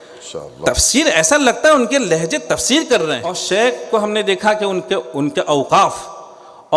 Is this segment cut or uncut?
cut